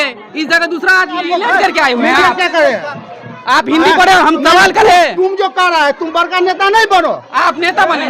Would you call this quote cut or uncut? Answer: cut